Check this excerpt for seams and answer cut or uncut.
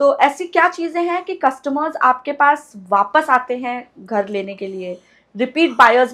uncut